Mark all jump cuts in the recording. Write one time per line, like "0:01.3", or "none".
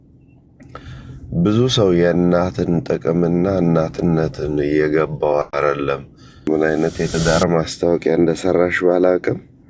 0:06.5